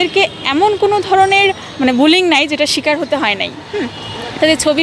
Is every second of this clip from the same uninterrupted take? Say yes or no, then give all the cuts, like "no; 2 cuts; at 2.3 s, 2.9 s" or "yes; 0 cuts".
yes; 0 cuts